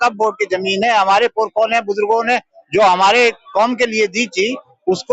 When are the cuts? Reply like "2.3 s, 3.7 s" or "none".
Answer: none